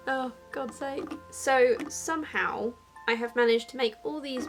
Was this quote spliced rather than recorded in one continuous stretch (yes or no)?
no